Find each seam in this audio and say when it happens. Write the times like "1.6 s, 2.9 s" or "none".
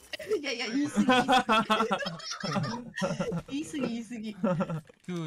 none